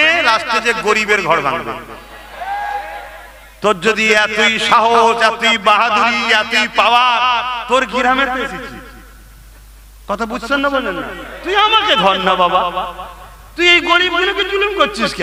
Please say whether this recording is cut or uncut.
uncut